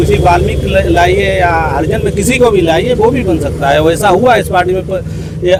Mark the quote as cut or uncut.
uncut